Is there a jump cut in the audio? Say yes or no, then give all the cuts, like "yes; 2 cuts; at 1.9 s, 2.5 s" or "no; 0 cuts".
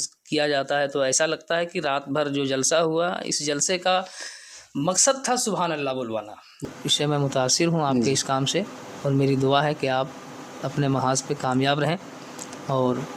yes; 1 cut; at 6.6 s